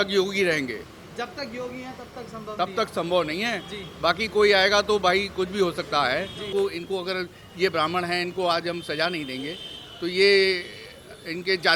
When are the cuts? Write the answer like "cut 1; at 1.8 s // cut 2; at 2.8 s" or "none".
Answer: cut 1; at 6.5 s